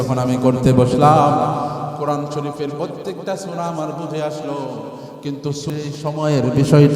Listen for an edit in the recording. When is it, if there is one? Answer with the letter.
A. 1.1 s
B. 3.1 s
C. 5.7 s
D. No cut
C